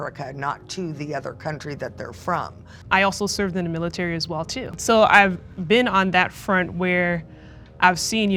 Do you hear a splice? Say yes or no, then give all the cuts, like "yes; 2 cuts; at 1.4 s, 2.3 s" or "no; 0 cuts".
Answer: yes; 2 cuts; at 2.7 s, 4.7 s